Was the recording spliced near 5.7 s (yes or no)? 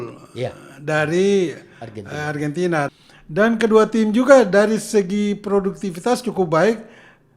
no